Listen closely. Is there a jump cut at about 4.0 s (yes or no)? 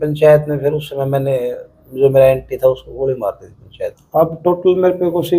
yes